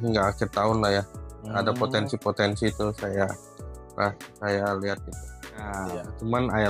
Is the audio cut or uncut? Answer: cut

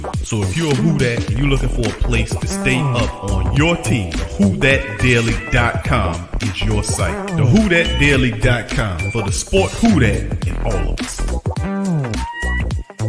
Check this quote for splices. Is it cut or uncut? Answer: uncut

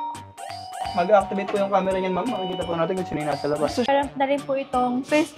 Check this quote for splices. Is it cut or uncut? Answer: cut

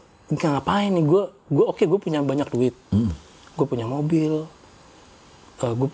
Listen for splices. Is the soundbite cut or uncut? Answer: uncut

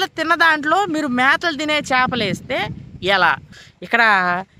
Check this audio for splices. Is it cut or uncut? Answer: cut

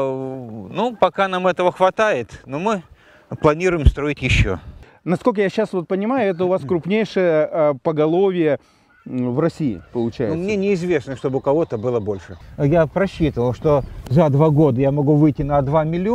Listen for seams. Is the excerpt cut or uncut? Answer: cut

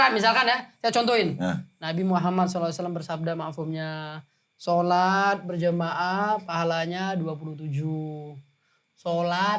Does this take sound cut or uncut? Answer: uncut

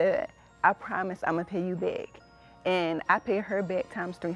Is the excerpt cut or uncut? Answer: uncut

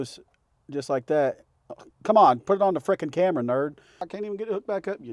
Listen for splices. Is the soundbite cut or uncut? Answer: cut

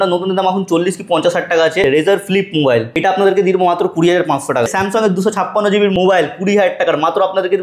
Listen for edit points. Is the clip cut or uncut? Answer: cut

